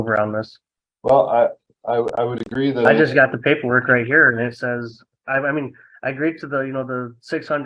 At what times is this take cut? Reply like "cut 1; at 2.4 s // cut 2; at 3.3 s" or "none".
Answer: cut 1; at 2.9 s